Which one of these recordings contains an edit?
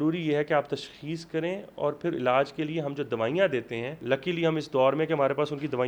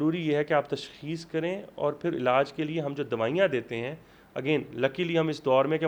first; 1 cut; at 4.0 s

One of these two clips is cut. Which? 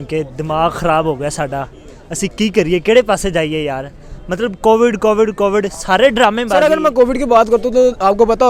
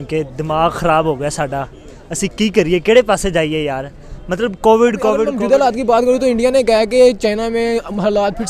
second; 1 cut; at 5.3 s

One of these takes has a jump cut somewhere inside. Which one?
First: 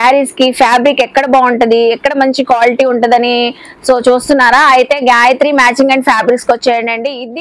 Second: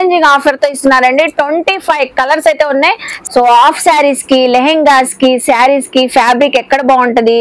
second; 1 cut; at 3.1 s

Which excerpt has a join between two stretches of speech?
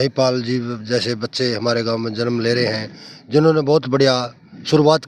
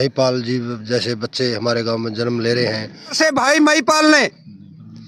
second; 1 cut; at 3.2 s

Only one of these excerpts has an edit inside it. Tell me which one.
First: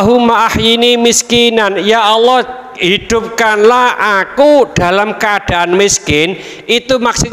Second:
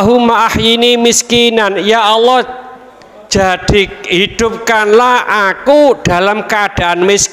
first; 1 cut; at 2.7 s

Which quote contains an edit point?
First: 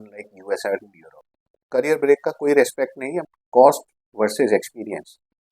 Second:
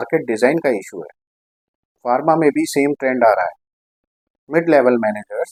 first; 1 cut; at 3.4 s

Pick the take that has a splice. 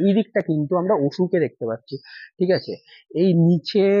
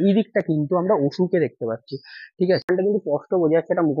second; 1 cut; at 2.6 s

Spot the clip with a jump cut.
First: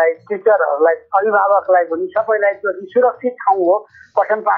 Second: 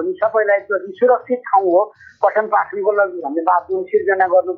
first; 1 cut; at 1.0 s

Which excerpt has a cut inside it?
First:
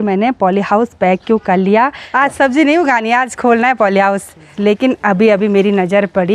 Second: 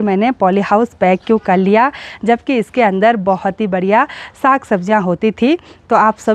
first; 2 cuts; at 2.0 s, 4.4 s

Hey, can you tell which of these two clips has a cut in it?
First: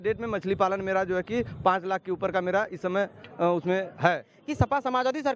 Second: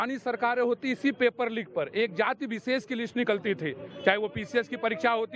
first; 1 cut; at 4.4 s

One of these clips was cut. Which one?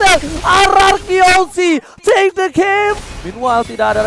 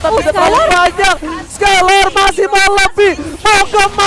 first; 1 cut; at 3.0 s

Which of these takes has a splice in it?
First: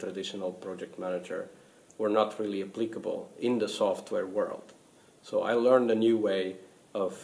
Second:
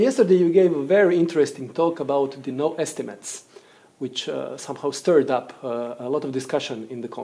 first; 1 cut; at 2.8 s

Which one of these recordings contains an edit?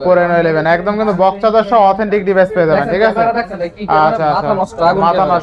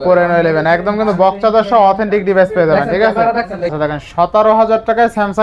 second; 1 cut; at 3.7 s

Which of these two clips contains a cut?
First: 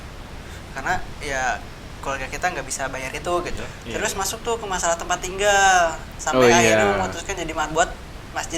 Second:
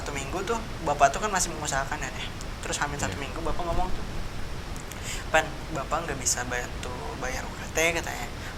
first; 1 cut; at 4.0 s

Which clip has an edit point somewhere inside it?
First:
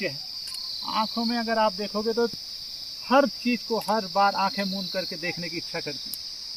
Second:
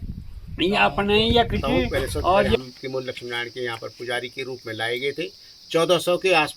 second; 1 cut; at 2.6 s

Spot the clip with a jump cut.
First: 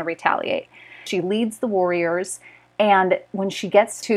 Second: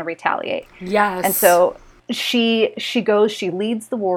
first; 1 cut; at 1.0 s

